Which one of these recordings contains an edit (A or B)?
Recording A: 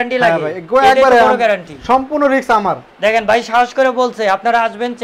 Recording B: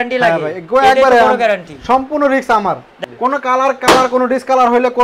B